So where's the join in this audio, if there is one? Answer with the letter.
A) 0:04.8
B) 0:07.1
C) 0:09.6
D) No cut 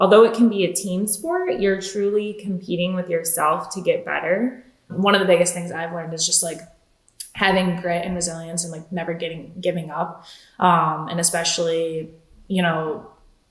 A